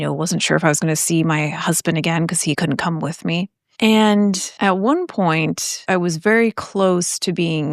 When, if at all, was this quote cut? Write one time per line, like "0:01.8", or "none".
0:02.6
0:03.6
0:04.5
0:05.7